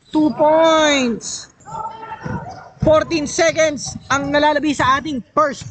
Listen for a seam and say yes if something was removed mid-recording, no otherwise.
yes